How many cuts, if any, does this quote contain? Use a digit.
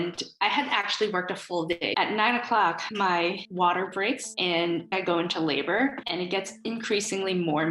2